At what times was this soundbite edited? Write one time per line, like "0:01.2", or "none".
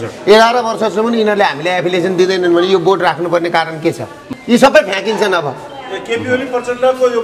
0:04.3